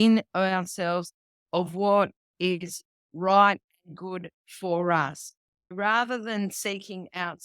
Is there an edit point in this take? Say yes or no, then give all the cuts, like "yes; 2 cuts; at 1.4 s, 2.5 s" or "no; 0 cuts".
yes; 1 cut; at 5.7 s